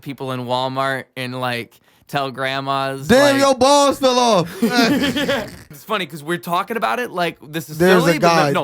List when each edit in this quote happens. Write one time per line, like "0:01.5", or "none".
0:05.7